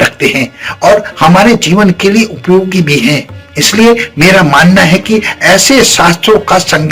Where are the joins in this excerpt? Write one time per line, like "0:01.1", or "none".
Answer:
none